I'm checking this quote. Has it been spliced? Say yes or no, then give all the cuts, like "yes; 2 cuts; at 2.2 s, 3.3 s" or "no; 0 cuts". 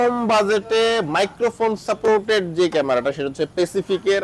no; 0 cuts